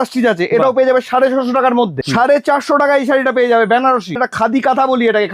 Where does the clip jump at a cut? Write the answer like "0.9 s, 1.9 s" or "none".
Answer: 2.0 s, 4.2 s